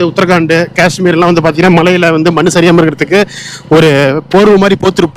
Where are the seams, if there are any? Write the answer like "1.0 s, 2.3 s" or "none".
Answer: none